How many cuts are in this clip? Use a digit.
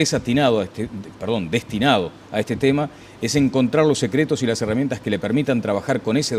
1